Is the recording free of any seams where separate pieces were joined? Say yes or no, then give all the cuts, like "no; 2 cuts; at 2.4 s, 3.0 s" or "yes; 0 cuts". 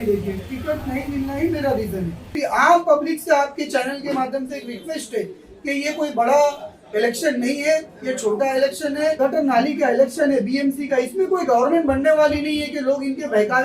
no; 2 cuts; at 2.3 s, 9.2 s